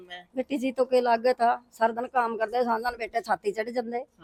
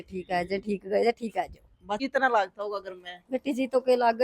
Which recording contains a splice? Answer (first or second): second